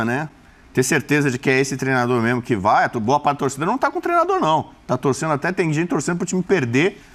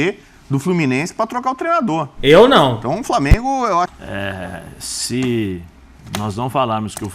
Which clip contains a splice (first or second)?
second